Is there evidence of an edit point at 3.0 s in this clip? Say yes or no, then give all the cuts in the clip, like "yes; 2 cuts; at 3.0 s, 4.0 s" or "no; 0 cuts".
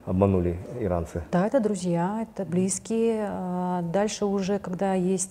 no; 1 cut; at 1.3 s